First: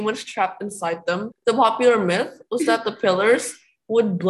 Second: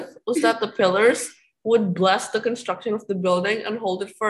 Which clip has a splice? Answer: first; 1 cut; at 1.3 s

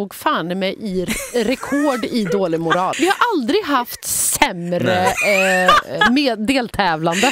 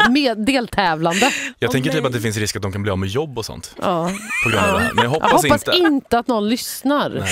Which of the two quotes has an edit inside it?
first; 1 cut; at 2.9 s

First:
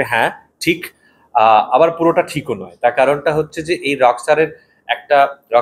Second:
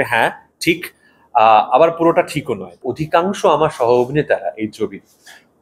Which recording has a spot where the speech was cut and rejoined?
second; 1 cut; at 2.7 s

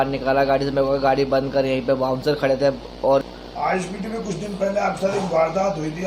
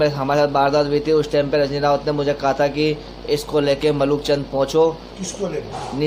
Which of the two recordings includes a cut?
first; 1 cut; at 3.2 s

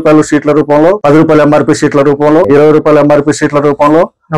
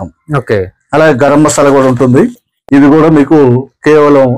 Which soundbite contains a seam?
first; 2 cuts; at 1.0 s, 2.5 s

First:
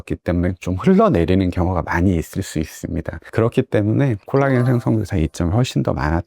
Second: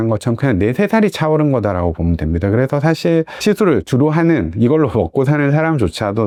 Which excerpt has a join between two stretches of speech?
first; 1 cut; at 4.2 s

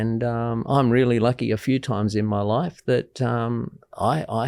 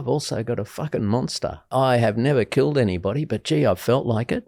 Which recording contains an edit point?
second; 1 cut; at 1.7 s

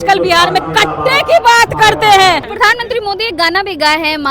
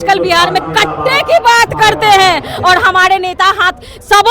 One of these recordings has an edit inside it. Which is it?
first; 1 cut; at 2.5 s

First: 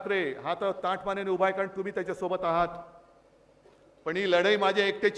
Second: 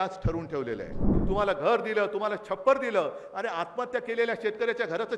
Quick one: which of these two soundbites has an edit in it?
second; 1 cut; at 1.1 s

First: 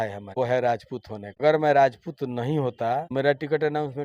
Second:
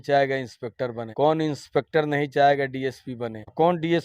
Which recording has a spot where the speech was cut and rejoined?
first; 1 cut; at 1.2 s

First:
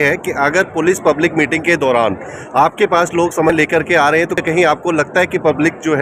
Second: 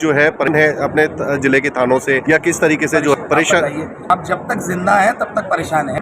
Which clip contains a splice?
second; 1 cut; at 3.1 s

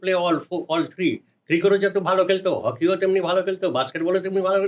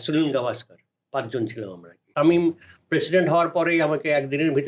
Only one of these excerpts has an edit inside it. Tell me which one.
second; 1 cut; at 2.1 s

